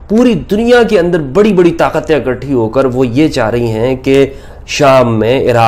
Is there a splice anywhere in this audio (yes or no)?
no